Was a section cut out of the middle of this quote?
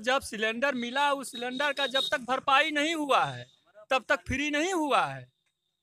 no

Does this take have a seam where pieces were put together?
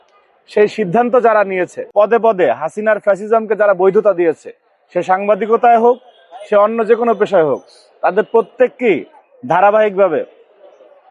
yes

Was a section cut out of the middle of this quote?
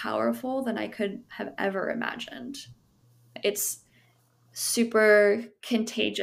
yes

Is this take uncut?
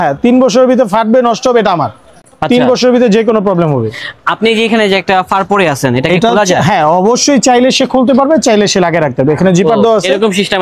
yes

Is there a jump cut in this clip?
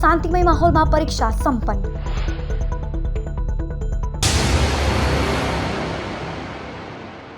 yes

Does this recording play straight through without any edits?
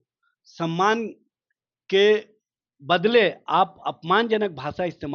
yes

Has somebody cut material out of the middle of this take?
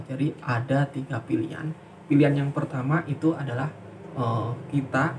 no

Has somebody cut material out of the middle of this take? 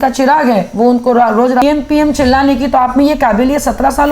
yes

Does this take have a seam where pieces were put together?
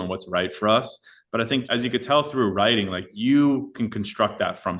yes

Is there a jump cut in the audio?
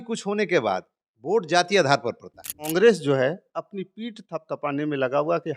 yes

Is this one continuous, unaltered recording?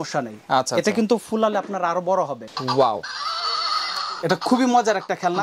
no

